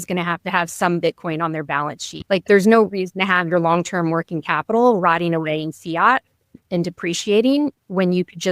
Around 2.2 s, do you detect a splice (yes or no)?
yes